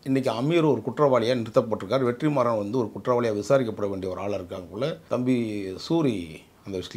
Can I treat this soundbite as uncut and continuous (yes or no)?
no